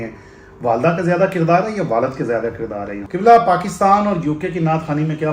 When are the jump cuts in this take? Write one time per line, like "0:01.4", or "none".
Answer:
0:03.0